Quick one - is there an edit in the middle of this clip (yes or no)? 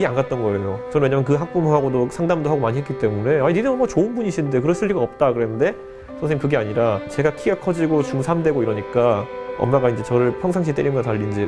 yes